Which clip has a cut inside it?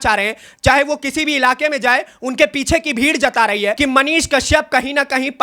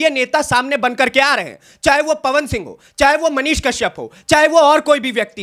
first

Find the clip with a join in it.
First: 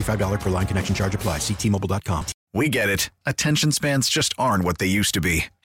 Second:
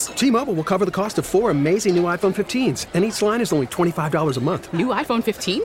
first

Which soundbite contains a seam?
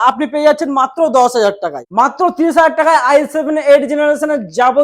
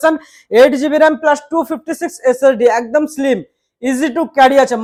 first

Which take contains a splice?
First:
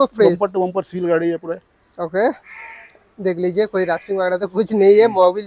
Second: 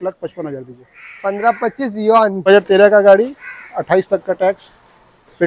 second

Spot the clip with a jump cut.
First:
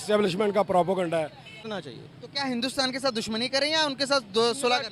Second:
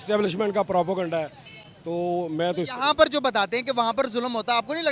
first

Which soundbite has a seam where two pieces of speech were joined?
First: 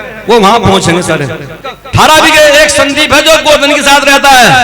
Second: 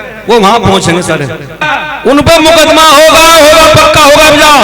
first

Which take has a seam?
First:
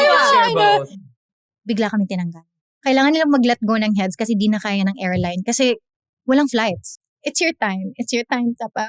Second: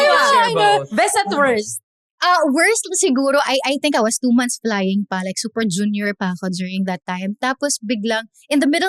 first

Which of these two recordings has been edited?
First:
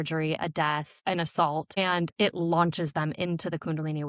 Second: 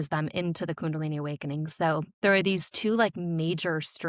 first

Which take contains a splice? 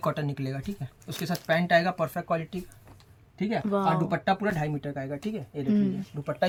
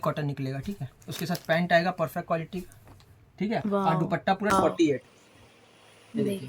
second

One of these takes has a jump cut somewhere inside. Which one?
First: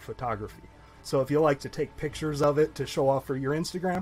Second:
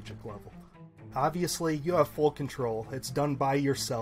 second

